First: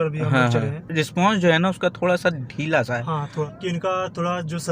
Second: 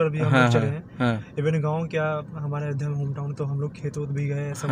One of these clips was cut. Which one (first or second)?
first